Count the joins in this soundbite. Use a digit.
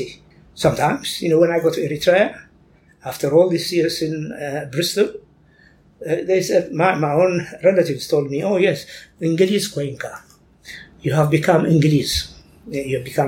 0